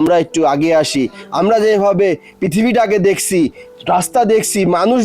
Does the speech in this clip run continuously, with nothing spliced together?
yes; 0 cuts

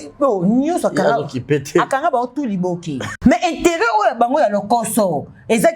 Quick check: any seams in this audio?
yes; 1 cut; at 3.2 s

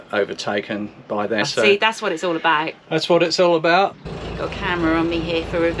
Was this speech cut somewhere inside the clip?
yes; 2 cuts; at 1.4 s, 4.0 s

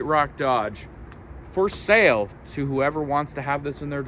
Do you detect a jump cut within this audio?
no; 0 cuts

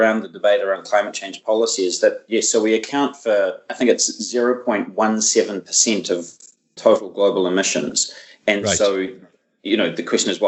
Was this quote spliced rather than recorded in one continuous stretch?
no; 0 cuts

